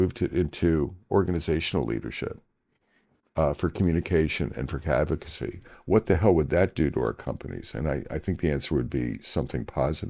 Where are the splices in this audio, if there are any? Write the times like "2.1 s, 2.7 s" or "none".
none